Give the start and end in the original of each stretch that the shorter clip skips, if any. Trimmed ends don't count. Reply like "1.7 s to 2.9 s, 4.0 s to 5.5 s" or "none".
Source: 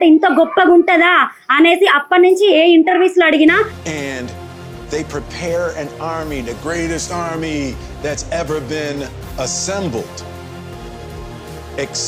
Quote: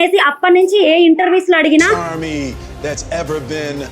3.7 s to 7.2 s